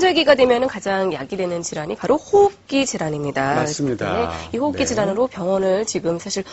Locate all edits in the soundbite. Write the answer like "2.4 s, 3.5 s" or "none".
1.9 s